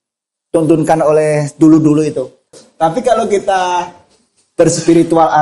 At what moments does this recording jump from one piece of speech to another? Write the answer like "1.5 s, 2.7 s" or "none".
2.5 s